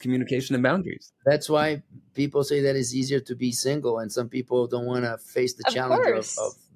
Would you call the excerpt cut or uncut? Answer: uncut